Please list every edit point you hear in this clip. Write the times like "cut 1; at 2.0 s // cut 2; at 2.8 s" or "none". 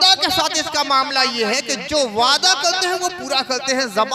none